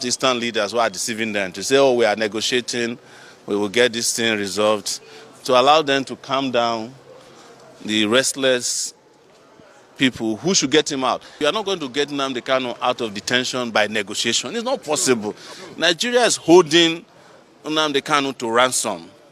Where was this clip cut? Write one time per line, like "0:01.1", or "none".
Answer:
0:11.4